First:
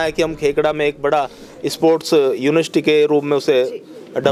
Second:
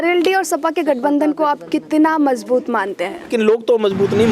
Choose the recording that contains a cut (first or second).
second